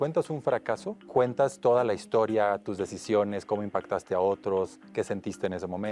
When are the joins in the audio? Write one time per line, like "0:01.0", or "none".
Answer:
0:00.9